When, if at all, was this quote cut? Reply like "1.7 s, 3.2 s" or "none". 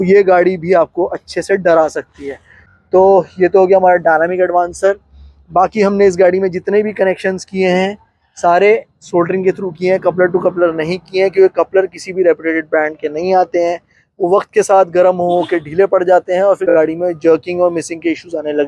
none